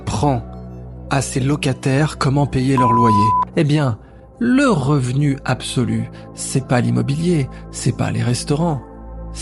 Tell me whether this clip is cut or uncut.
cut